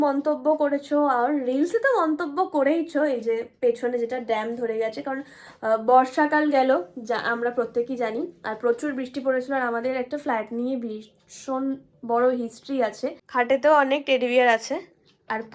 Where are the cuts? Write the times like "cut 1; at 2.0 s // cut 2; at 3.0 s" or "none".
cut 1; at 13.2 s